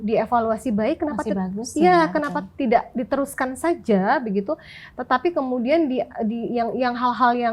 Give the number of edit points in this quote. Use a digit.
0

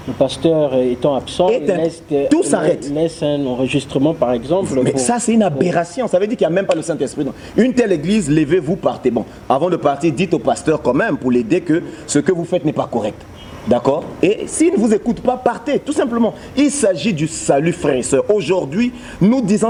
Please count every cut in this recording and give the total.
0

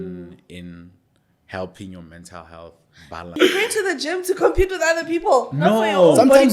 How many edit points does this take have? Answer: 1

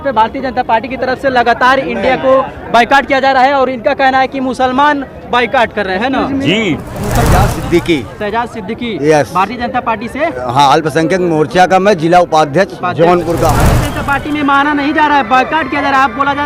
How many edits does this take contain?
2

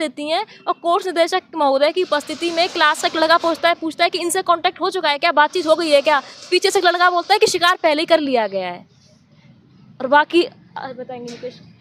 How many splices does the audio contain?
0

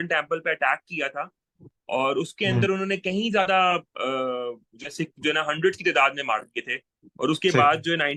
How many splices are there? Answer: 0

